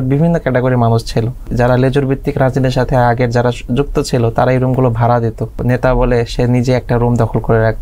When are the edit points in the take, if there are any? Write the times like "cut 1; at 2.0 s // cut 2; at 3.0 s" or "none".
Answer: cut 1; at 1.5 s // cut 2; at 5.6 s